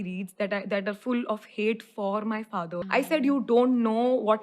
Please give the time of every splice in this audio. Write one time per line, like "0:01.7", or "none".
0:02.8